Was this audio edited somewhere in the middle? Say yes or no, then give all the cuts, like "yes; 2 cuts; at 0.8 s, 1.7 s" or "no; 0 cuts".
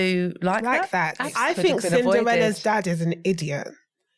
yes; 1 cut; at 1.3 s